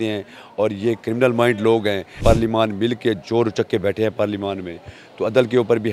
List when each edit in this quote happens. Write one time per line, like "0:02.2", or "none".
0:02.2